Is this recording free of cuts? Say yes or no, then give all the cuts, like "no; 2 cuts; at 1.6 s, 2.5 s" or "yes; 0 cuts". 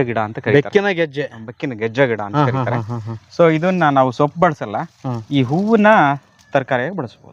yes; 0 cuts